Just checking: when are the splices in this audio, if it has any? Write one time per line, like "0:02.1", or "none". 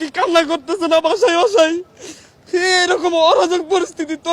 none